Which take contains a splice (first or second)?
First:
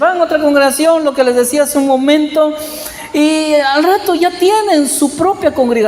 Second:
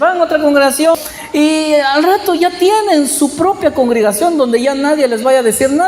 second